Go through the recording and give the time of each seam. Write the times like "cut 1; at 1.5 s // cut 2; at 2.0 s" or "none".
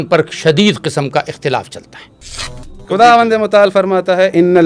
cut 1; at 2.5 s